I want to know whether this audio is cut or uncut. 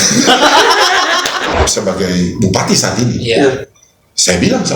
cut